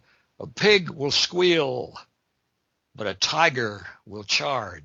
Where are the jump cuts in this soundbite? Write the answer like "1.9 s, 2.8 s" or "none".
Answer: none